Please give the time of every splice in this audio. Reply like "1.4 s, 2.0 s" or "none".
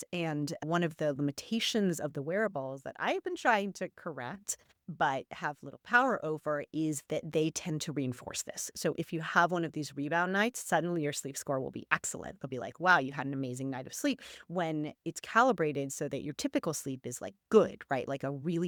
none